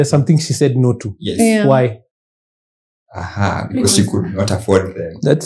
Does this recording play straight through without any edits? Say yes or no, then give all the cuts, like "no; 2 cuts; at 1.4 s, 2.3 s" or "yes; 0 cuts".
yes; 0 cuts